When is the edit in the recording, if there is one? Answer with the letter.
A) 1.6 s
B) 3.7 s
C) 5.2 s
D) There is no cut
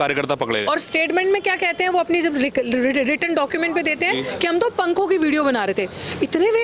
D